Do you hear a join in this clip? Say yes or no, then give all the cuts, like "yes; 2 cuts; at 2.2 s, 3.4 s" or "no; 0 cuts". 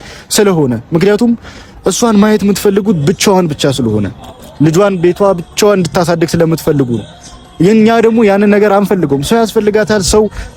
no; 0 cuts